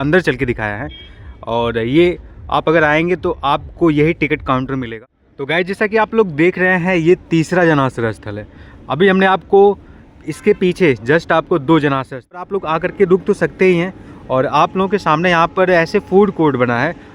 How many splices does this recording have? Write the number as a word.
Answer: two